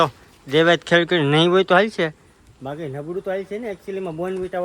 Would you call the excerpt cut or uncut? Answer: uncut